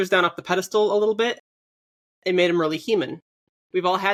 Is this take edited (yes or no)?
no